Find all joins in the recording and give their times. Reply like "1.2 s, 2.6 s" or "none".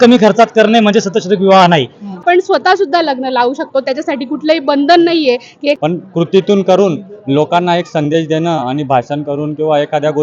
2.2 s, 5.8 s